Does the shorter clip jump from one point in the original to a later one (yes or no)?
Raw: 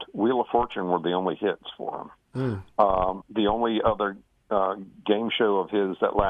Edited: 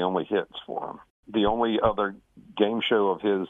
yes